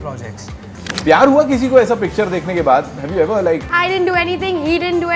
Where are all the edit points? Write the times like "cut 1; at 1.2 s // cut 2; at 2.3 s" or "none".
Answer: cut 1; at 0.9 s // cut 2; at 3.7 s